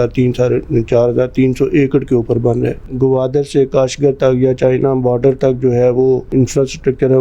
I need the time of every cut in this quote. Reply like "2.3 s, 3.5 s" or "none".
2.9 s, 6.3 s